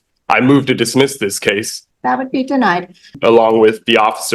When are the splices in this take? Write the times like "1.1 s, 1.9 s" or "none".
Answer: 1.7 s, 3.1 s